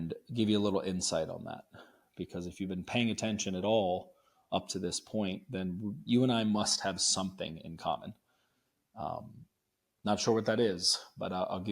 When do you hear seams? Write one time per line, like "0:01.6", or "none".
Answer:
none

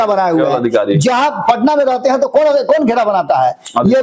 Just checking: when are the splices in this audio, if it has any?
none

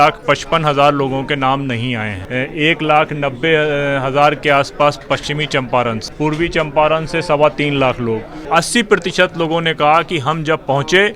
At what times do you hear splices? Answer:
0:02.2
0:06.1
0:08.3

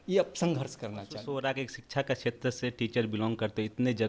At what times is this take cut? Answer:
0:01.2

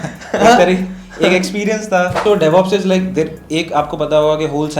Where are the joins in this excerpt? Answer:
0:02.1

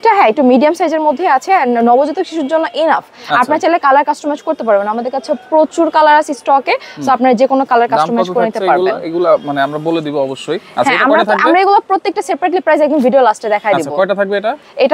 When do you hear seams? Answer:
none

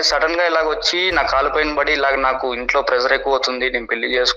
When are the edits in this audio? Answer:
none

